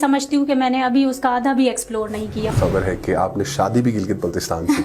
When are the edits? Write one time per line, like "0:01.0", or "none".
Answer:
0:02.5